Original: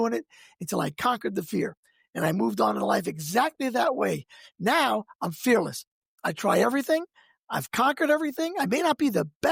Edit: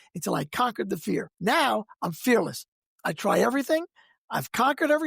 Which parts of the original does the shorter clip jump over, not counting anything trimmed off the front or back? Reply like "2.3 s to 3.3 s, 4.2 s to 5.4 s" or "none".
1.8 s to 4.5 s

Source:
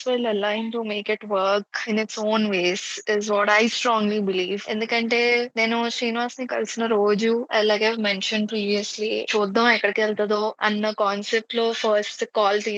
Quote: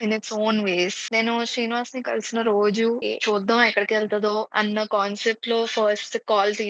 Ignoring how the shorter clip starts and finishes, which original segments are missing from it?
2.9 s to 5.5 s, 7.5 s to 9.1 s

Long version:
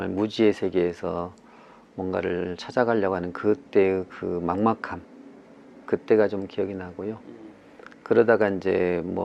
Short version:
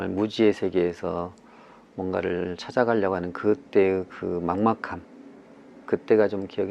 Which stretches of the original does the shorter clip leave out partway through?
none

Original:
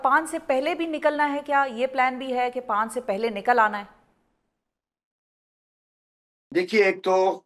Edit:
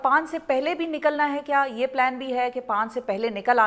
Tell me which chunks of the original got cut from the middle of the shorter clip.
none

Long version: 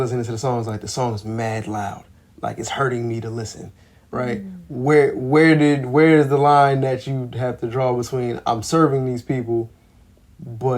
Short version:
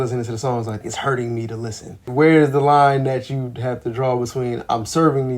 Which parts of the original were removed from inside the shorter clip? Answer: 0.9 s to 2.6 s, 3.8 s to 5.8 s

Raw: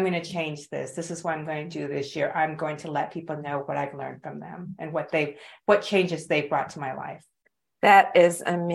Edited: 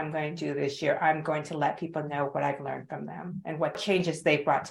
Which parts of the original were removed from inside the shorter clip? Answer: 5.1 s to 5.8 s

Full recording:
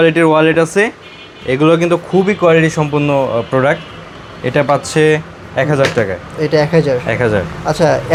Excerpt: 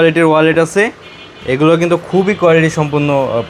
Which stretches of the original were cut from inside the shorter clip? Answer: none

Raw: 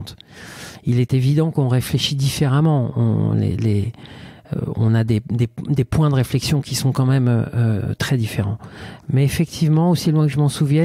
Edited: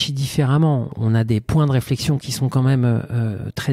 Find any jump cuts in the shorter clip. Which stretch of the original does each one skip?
3.0 s to 5.4 s

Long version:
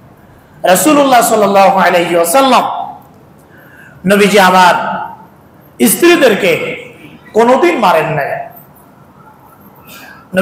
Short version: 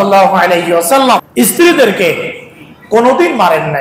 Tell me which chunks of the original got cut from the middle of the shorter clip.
2.7 s to 5.7 s

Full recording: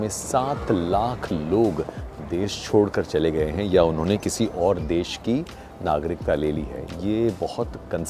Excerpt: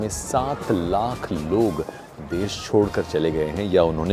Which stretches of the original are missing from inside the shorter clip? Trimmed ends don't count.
none

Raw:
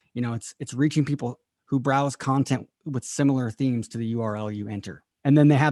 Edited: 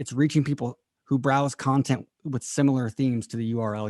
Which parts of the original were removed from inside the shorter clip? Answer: none

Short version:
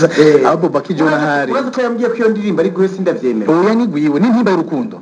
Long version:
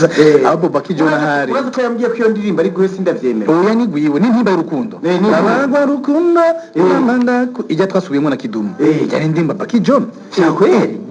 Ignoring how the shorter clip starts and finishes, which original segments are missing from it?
none

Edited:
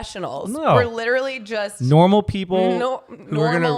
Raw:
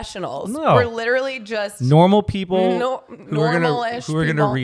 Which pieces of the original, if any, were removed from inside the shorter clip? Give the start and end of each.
none

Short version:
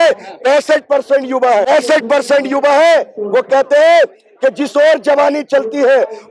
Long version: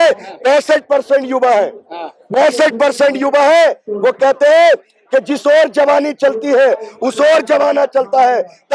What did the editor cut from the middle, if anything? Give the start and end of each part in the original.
1.7 s to 2.4 s

